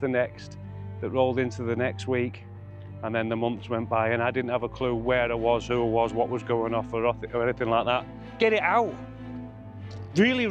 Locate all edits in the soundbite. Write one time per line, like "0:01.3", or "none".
0:08.2